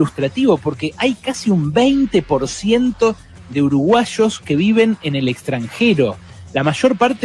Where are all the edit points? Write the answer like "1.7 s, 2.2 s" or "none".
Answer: none